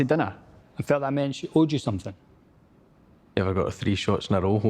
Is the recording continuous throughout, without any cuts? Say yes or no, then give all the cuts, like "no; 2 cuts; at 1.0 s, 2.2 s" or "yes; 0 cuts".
no; 1 cut; at 2.6 s